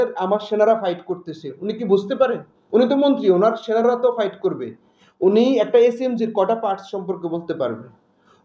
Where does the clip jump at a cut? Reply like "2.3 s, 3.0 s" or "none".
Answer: none